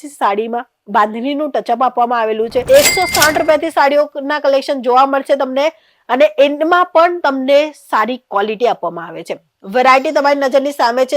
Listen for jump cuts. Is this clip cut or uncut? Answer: cut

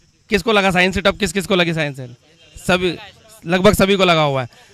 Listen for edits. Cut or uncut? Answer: uncut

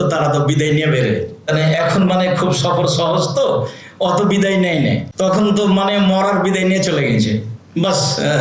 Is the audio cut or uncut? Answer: cut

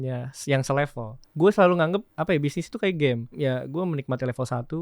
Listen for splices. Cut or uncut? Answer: cut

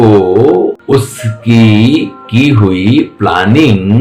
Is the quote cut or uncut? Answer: uncut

